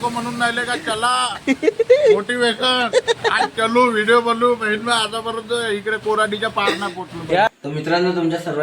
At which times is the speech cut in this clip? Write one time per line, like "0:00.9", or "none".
0:07.5